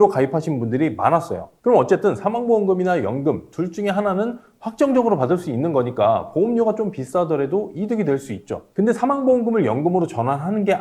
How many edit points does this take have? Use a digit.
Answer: 1